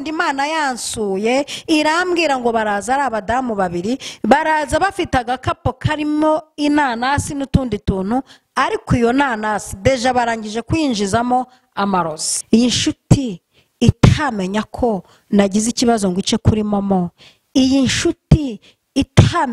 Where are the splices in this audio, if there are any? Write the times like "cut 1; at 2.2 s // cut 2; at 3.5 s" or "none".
cut 1; at 12.3 s